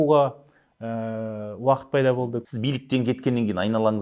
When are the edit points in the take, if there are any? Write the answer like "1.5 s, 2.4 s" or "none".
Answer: 2.4 s